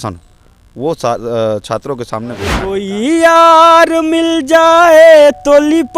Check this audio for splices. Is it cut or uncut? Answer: cut